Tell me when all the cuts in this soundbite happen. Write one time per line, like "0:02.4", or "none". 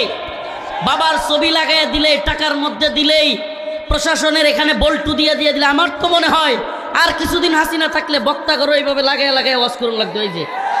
none